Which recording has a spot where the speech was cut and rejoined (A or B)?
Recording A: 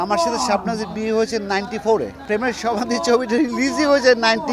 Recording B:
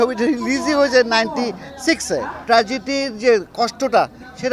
B